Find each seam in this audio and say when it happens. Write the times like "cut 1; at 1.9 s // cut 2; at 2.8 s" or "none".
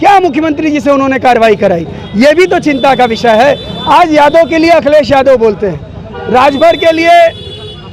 none